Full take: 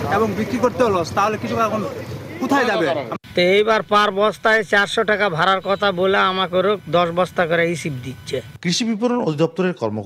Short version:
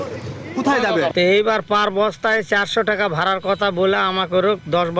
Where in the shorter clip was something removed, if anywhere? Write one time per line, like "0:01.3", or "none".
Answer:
0:01.1